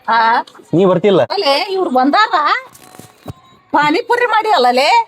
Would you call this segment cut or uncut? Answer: cut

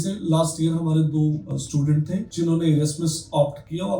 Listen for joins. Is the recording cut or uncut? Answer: cut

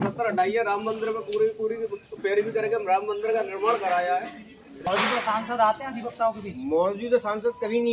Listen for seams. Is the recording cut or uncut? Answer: cut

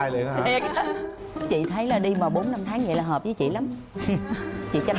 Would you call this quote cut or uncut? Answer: uncut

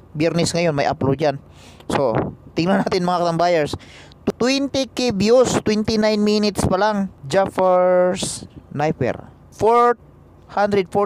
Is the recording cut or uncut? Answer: cut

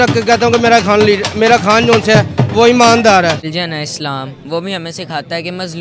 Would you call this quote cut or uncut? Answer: cut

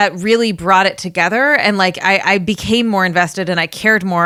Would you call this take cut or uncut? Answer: uncut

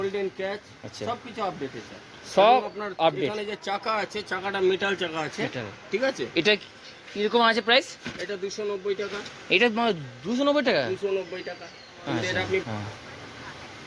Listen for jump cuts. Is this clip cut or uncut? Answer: cut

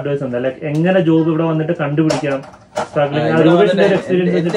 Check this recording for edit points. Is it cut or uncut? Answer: uncut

